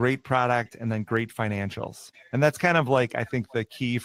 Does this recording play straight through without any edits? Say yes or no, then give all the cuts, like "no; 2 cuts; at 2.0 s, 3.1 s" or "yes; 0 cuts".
yes; 0 cuts